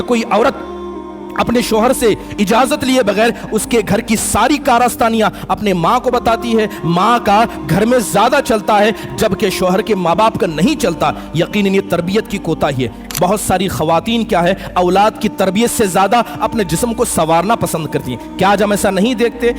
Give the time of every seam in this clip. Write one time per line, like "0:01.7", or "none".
0:13.0